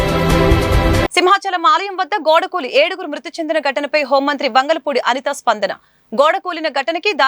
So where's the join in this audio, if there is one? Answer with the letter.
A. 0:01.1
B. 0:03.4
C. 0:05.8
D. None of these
D